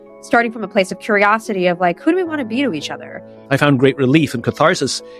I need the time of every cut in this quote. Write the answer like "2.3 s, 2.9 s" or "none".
3.3 s